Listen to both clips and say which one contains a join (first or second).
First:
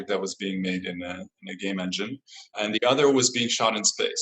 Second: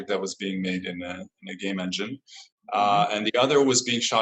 first